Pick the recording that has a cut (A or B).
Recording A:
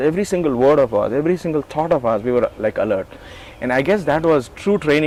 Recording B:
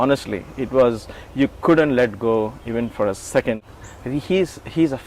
B